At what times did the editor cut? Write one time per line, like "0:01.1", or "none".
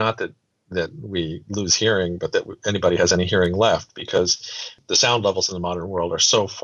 0:04.8